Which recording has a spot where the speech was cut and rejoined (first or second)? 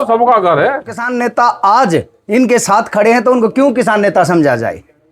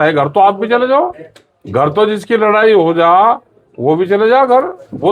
first